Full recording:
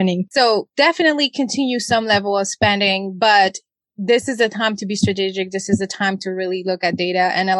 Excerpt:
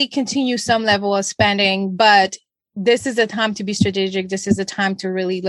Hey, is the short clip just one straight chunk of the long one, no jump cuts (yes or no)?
yes